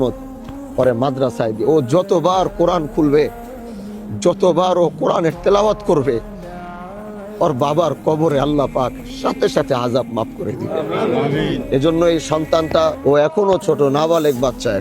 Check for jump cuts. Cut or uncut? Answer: cut